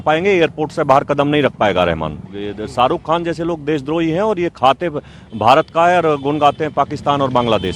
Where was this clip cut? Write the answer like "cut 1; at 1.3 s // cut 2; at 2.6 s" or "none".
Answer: cut 1; at 2.3 s